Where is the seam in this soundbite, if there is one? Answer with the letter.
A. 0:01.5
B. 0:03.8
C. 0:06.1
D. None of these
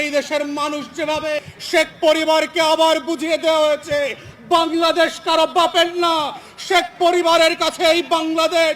A